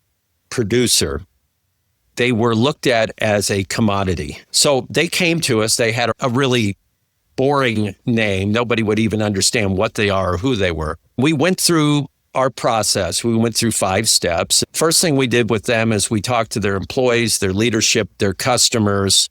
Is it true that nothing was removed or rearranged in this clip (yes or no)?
no